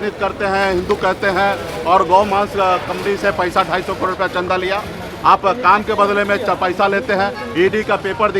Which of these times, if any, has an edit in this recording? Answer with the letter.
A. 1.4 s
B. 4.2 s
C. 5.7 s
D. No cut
D